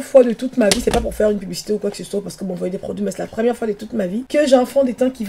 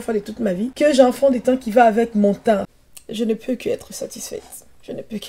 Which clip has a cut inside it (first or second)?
second